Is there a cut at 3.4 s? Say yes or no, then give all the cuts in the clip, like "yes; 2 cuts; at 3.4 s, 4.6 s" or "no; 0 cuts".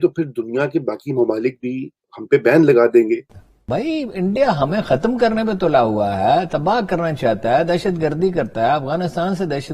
yes; 1 cut; at 3.4 s